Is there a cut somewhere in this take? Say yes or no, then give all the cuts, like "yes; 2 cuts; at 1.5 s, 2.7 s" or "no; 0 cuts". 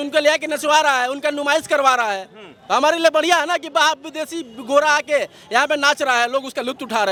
no; 0 cuts